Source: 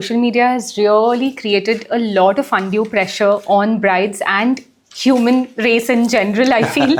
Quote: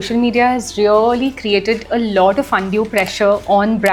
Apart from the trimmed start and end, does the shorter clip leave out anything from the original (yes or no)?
no